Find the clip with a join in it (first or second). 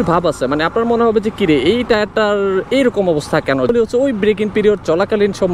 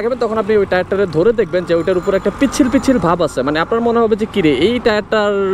first